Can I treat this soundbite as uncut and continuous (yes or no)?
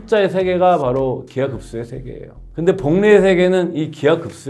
yes